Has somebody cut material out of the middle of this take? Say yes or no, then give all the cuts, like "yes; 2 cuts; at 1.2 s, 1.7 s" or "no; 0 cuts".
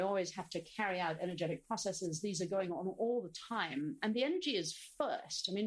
no; 0 cuts